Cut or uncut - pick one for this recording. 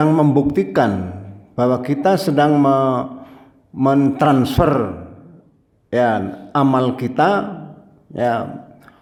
uncut